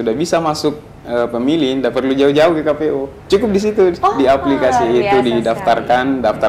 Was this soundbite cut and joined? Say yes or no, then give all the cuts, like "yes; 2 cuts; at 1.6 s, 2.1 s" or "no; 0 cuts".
yes; 1 cut; at 3.2 s